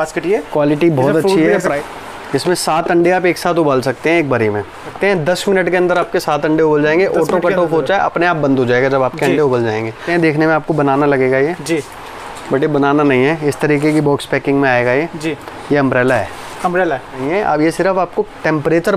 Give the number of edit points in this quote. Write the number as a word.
four